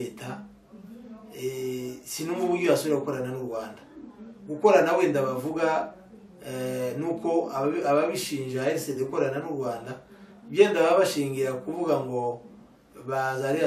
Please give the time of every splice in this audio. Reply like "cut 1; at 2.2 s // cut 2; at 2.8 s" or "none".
none